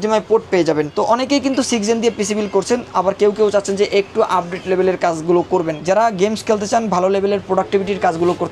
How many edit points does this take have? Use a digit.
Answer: 2